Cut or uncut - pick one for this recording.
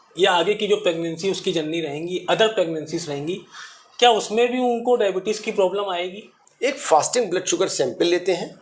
cut